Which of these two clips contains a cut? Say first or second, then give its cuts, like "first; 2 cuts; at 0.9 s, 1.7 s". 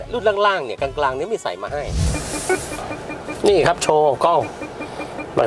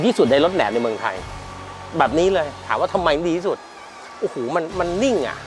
first; 1 cut; at 2.1 s